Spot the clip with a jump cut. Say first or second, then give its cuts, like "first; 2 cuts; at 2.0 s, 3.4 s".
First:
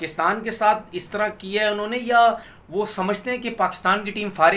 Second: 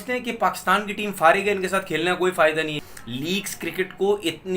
second; 1 cut; at 2.8 s